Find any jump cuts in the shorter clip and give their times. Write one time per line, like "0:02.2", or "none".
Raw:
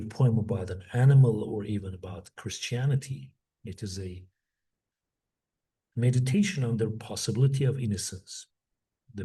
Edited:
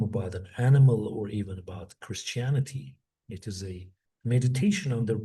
0:04.0